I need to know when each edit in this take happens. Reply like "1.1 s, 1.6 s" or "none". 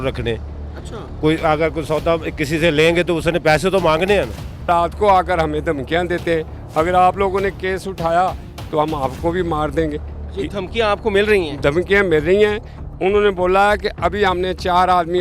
4.7 s